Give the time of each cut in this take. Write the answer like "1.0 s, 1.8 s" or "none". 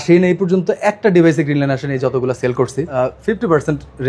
2.8 s